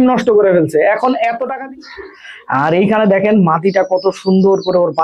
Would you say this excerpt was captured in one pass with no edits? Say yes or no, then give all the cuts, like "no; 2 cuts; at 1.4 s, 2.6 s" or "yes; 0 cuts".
no; 1 cut; at 1.5 s